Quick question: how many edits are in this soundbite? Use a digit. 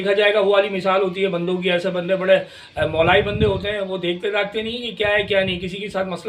0